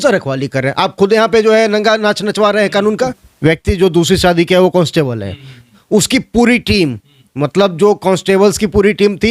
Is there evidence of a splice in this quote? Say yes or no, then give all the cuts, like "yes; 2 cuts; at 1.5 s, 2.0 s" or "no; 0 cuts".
yes; 1 cut; at 3.3 s